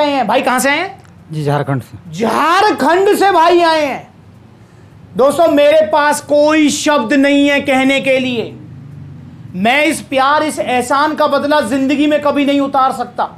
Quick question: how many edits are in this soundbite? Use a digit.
0